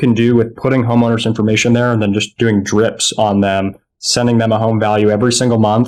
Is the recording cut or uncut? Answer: uncut